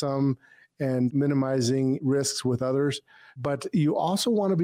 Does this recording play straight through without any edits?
no; 1 cut; at 2.0 s

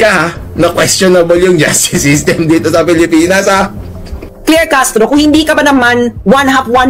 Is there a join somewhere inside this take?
no; 0 cuts

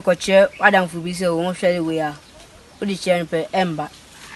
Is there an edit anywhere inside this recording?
no; 0 cuts

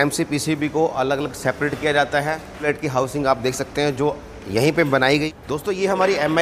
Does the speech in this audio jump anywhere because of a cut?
yes; 2 cuts; at 2.6 s, 5.1 s

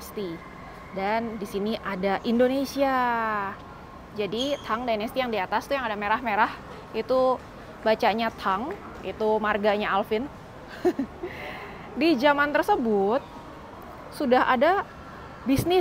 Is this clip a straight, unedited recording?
yes; 0 cuts

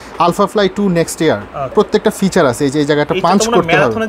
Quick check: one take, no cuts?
no; 1 cut; at 1.7 s

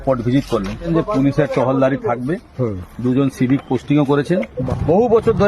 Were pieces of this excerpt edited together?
yes; 2 cuts; at 0.8 s, 4.6 s

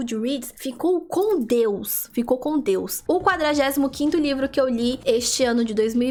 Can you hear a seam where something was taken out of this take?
no; 0 cuts

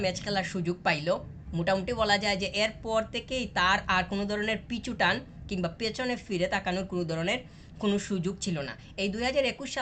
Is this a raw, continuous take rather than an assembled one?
yes; 0 cuts

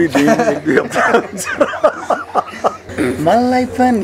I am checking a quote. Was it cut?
yes; 1 cut; at 2.8 s

